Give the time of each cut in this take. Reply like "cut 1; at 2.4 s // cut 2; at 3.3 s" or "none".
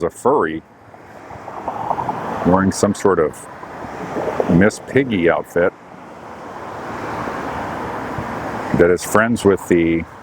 none